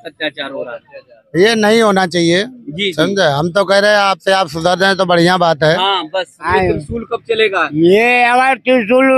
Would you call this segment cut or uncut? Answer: cut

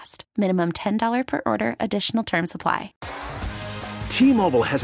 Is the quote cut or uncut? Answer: cut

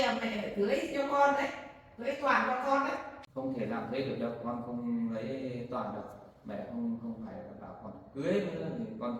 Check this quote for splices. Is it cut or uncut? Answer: cut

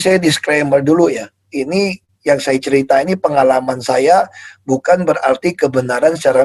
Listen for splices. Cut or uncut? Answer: uncut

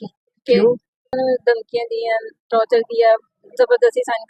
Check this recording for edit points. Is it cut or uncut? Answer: cut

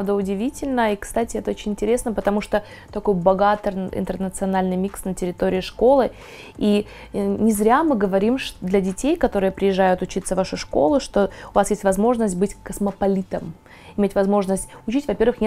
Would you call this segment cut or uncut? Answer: uncut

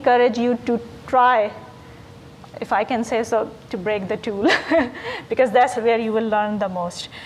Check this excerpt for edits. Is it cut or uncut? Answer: uncut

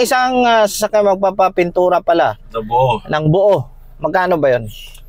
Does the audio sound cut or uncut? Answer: uncut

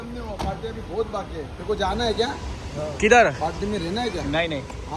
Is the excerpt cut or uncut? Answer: uncut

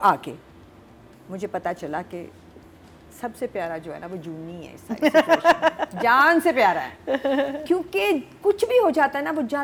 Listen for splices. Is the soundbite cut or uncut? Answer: uncut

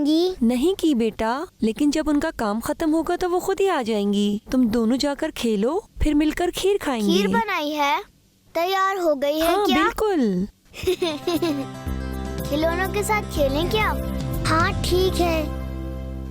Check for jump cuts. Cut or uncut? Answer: uncut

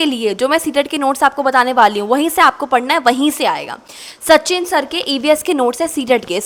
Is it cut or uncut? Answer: uncut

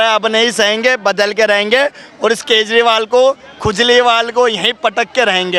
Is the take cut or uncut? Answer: uncut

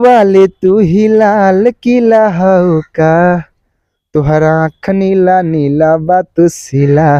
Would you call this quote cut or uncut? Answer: uncut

